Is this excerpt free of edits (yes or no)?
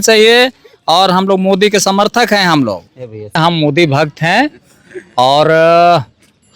no